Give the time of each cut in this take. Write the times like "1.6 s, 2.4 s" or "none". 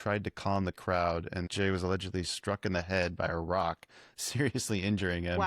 1.5 s